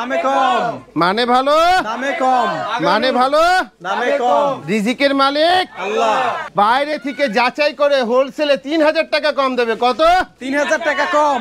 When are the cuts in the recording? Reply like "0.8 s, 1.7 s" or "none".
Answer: 6.4 s